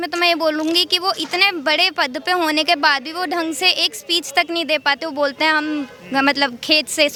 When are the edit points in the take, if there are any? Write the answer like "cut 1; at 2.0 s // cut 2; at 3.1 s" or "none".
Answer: none